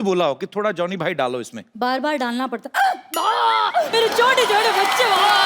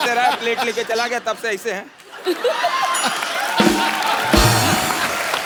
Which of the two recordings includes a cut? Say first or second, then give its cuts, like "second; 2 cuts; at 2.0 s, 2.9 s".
first; 2 cuts; at 1.6 s, 3.9 s